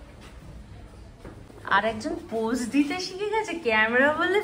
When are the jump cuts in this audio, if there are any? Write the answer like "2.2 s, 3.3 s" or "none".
none